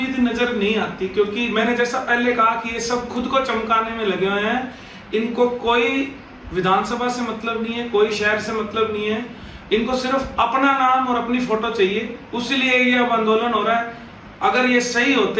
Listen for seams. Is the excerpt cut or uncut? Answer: uncut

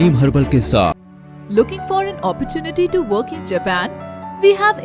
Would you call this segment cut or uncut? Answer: cut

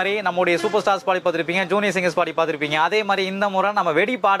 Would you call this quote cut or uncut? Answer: uncut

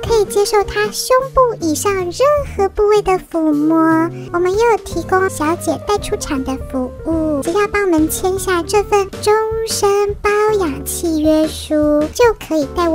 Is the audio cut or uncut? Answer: cut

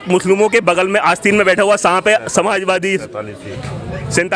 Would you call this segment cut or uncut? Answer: uncut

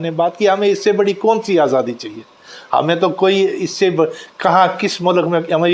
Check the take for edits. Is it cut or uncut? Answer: uncut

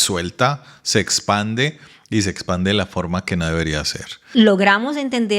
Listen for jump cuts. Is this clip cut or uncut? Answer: cut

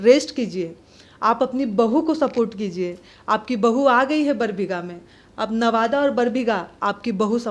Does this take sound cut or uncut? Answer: uncut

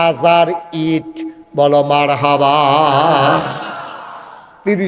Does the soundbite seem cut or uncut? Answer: uncut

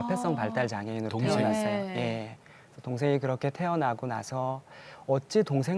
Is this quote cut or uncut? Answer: uncut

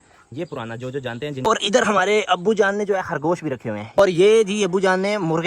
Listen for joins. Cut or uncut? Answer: cut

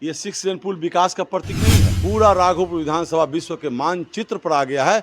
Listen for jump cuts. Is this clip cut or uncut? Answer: cut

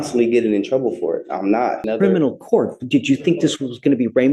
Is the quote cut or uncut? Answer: cut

